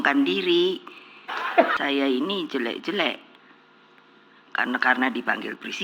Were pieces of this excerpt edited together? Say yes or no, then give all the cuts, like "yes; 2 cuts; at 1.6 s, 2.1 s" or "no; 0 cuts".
yes; 1 cut; at 1.7 s